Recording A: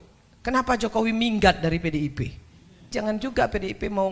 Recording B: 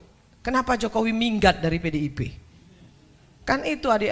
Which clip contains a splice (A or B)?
A